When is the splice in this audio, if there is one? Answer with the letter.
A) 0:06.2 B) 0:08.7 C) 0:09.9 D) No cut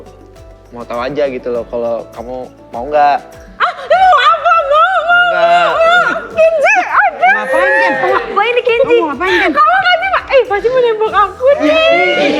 A